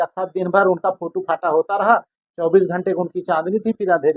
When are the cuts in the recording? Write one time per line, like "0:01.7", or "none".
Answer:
0:02.2